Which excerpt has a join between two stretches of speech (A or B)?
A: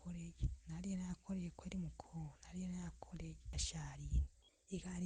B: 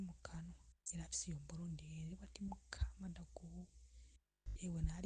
A